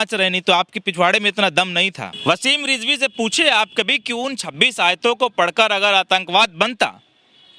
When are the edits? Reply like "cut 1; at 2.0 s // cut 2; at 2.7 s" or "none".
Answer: cut 1; at 2.1 s